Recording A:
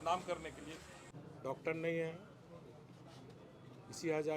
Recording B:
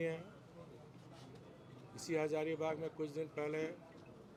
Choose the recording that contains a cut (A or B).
A